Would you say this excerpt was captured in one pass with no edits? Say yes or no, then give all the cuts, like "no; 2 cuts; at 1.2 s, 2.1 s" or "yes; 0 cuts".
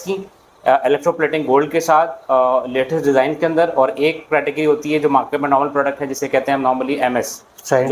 yes; 0 cuts